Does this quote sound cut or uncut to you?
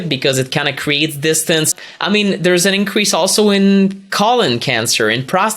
cut